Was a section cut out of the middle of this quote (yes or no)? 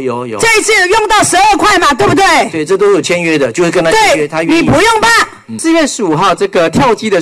yes